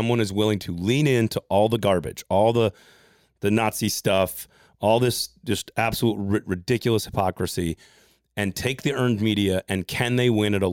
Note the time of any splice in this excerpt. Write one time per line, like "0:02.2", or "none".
none